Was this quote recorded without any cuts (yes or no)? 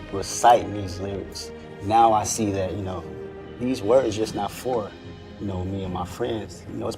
no